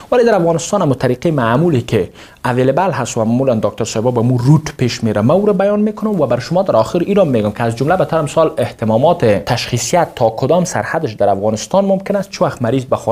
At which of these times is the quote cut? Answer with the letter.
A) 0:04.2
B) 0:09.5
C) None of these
B